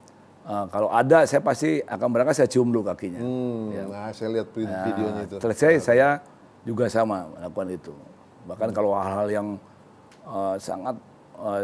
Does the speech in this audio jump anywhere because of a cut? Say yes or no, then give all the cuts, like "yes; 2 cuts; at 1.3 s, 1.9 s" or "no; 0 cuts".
no; 0 cuts